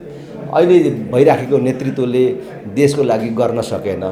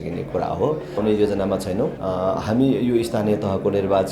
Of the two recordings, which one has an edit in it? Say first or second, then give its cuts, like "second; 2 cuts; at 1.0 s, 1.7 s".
second; 2 cuts; at 1.0 s, 2.0 s